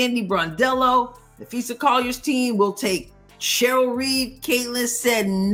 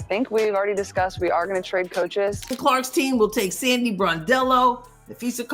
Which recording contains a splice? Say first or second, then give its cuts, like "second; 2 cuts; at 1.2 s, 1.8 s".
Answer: second; 1 cut; at 2.4 s